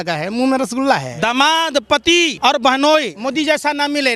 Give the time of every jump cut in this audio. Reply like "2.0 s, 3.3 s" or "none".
1.1 s, 2.3 s, 3.2 s